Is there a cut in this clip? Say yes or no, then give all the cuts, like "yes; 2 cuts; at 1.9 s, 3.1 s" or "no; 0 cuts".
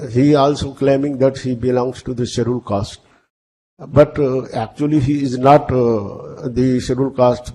no; 0 cuts